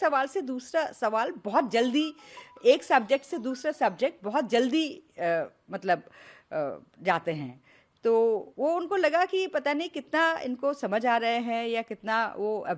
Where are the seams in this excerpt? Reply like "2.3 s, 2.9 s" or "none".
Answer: none